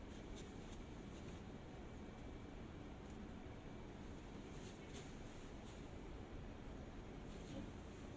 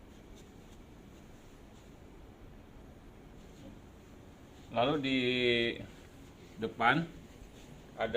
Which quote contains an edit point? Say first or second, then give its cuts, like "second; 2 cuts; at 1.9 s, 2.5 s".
second; 1 cut; at 1.2 s